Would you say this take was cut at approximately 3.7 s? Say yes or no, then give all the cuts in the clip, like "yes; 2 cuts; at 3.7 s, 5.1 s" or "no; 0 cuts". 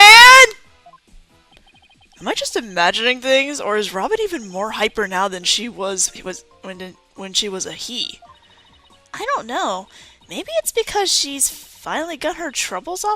no; 1 cut; at 7.6 s